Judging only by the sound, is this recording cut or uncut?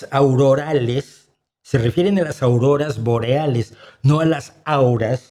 uncut